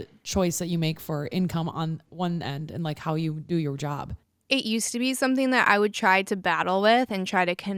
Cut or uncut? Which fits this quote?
uncut